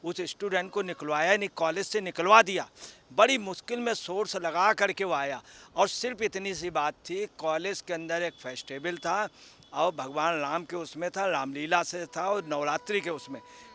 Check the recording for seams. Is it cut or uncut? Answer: uncut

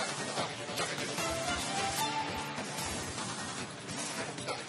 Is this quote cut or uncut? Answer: cut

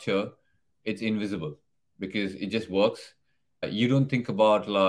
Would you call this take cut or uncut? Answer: cut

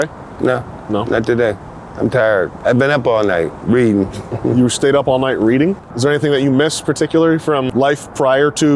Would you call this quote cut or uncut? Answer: cut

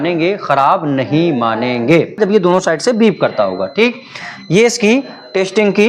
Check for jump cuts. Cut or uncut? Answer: cut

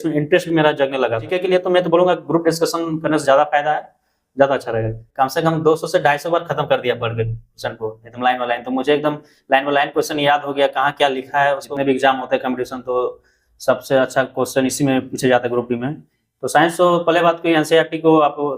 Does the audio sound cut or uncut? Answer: cut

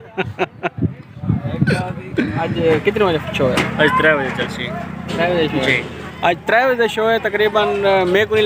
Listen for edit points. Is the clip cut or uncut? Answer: cut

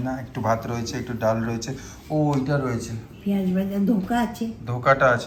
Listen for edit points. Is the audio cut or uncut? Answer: uncut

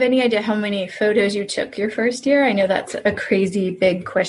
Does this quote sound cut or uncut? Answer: uncut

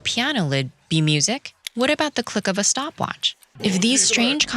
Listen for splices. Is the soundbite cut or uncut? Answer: cut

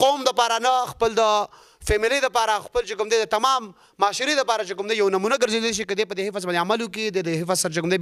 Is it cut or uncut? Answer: uncut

